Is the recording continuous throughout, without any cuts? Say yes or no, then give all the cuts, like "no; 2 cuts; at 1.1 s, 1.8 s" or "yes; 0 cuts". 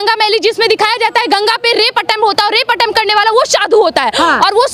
yes; 0 cuts